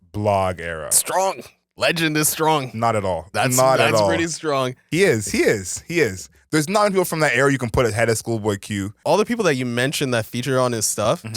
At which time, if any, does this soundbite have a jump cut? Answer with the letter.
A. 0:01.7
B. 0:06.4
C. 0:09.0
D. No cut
C